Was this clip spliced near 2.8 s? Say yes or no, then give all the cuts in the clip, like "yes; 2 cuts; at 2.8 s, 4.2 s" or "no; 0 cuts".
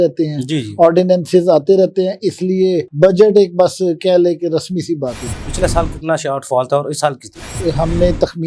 no; 2 cuts; at 5.3 s, 7.5 s